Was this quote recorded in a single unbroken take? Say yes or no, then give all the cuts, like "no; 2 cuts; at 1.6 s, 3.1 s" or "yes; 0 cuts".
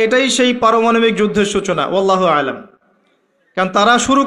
yes; 0 cuts